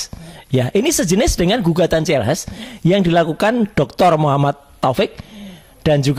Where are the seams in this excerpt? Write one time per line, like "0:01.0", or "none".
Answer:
none